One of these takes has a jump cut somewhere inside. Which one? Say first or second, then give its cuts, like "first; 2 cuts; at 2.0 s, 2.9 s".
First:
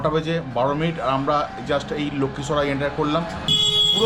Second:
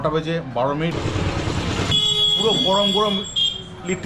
second; 2 cuts; at 0.9 s, 1.9 s